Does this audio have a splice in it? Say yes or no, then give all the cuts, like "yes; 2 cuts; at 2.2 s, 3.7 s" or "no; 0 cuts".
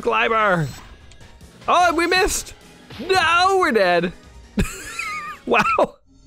no; 0 cuts